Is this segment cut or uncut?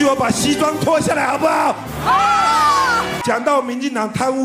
cut